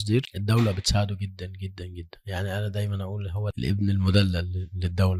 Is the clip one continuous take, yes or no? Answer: no